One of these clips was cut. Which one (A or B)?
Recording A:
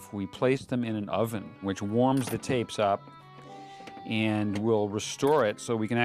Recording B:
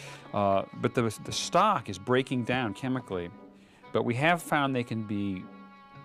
A